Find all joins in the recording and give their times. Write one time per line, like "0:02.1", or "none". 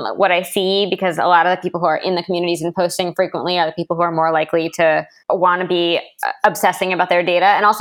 0:05.1